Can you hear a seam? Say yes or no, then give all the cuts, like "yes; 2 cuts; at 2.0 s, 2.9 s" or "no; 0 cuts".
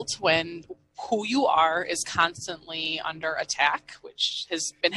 no; 0 cuts